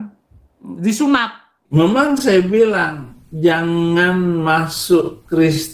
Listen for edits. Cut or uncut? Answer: cut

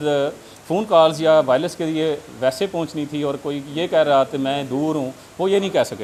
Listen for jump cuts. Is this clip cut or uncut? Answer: uncut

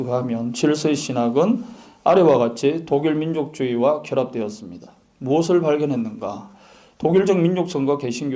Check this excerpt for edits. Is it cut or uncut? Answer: uncut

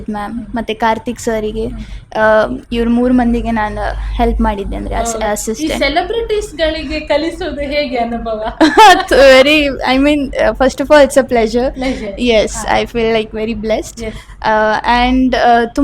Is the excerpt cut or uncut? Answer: uncut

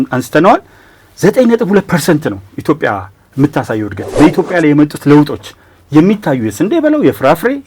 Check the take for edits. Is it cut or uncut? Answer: cut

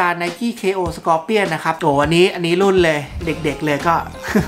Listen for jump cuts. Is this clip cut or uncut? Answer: cut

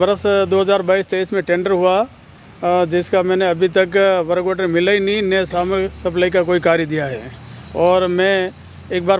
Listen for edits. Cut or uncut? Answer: uncut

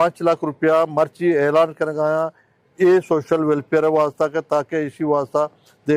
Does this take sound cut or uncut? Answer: uncut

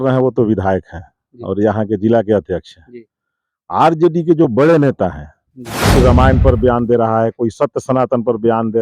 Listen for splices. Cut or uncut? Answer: cut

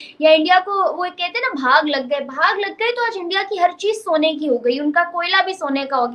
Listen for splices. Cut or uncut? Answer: uncut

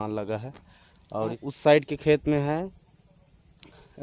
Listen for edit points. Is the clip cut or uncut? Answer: cut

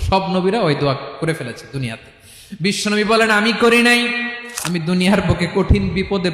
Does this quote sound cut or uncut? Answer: cut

